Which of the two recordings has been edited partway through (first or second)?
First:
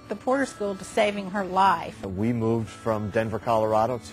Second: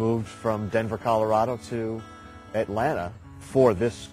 first